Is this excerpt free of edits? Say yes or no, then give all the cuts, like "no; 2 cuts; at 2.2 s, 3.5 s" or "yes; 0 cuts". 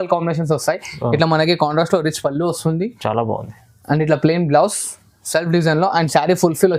yes; 0 cuts